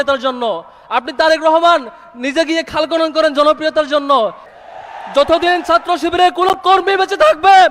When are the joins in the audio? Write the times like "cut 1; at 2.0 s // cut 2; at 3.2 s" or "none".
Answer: cut 1; at 4.5 s